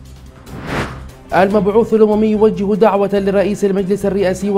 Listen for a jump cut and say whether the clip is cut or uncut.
cut